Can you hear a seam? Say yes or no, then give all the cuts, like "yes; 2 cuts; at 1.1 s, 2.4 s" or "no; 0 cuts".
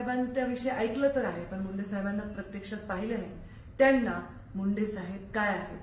no; 0 cuts